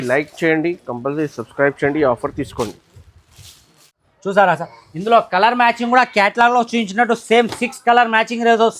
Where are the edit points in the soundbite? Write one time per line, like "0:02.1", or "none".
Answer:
0:03.9